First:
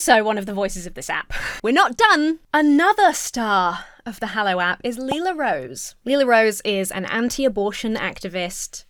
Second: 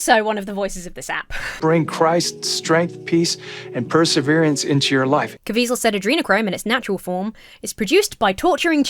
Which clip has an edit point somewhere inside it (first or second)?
second